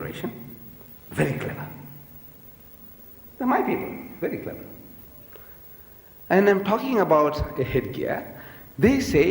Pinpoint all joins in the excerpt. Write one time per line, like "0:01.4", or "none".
0:04.0